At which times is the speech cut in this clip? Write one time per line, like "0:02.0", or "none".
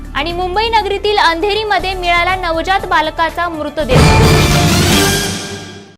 0:04.4